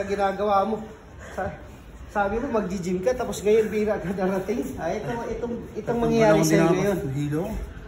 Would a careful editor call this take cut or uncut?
uncut